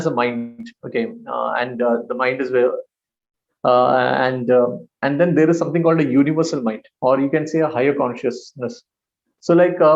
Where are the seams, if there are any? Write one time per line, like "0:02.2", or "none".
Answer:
none